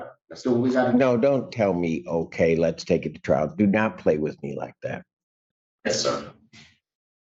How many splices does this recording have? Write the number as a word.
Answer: zero